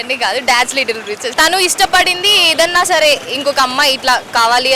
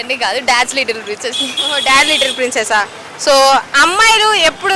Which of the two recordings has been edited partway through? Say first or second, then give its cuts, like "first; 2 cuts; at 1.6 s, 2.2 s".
first; 1 cut; at 1.3 s